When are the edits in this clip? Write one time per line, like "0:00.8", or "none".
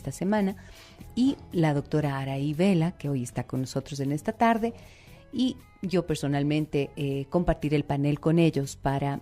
0:01.9